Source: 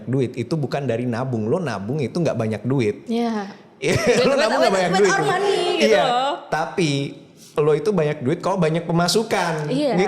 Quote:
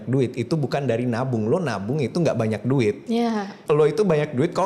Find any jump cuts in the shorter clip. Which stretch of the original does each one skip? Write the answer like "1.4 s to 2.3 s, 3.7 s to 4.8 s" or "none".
3.5 s to 7.4 s